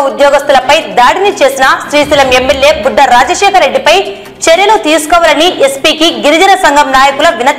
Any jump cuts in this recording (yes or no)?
no